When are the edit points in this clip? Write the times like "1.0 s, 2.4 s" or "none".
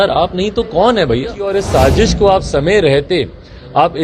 1.6 s